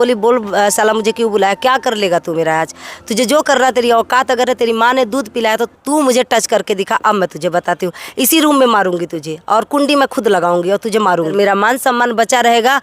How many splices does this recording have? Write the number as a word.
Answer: one